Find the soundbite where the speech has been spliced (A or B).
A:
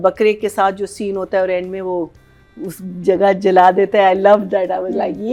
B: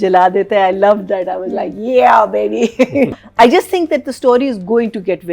B